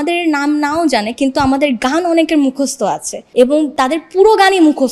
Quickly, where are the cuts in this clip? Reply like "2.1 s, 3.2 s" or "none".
none